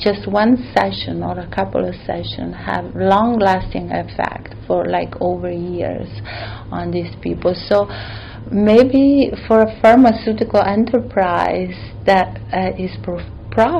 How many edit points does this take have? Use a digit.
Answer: 0